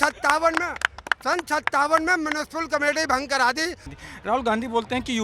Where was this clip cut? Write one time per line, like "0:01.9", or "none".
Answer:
0:03.9